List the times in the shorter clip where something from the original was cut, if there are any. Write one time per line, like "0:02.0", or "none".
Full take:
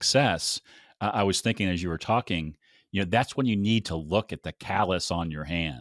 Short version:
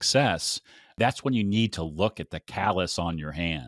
0:00.9